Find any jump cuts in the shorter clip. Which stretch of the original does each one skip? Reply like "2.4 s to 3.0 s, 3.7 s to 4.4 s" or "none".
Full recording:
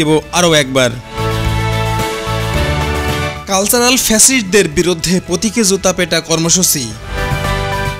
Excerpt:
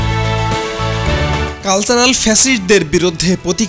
3.0 s to 3.4 s